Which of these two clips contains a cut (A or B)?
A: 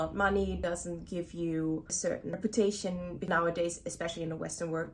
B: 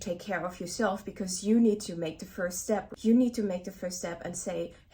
A